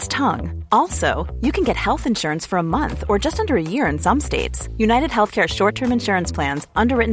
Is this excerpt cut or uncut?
uncut